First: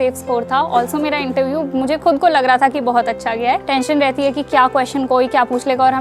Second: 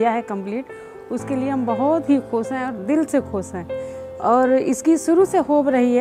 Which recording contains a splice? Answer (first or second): first